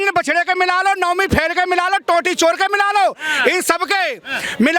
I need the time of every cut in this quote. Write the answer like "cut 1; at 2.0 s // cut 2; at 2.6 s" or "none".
none